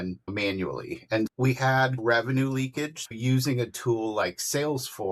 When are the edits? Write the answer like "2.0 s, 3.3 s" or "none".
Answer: 2.0 s, 3.1 s